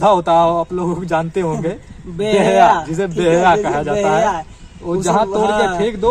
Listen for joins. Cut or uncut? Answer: uncut